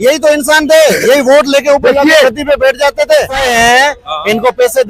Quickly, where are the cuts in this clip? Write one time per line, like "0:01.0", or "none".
0:03.4

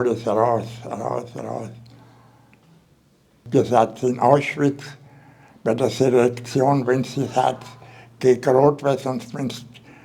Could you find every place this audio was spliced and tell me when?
0:03.4

